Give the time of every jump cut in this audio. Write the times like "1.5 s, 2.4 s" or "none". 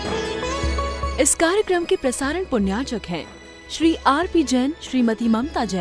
1.1 s